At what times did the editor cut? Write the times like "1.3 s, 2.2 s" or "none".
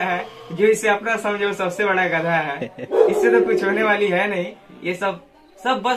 none